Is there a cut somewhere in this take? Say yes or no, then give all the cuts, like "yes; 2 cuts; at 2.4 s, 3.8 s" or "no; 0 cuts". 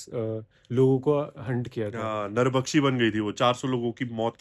no; 0 cuts